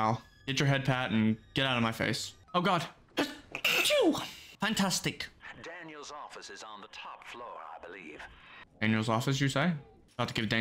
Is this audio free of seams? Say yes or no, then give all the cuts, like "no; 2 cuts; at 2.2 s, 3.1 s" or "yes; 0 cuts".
yes; 0 cuts